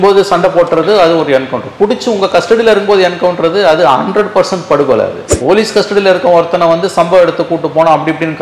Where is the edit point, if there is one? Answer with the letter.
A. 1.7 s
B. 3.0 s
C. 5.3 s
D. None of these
C